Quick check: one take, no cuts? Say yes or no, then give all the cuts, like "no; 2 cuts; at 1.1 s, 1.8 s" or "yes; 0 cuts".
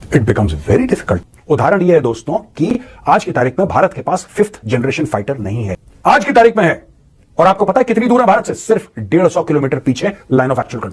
no; 2 cuts; at 1.2 s, 5.8 s